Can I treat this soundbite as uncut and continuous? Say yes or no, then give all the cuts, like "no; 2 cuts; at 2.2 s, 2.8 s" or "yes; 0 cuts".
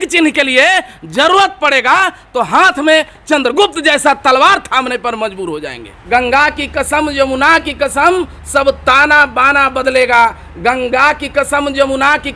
no; 1 cut; at 6.0 s